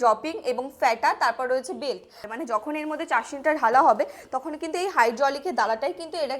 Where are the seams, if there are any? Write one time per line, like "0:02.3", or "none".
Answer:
0:02.3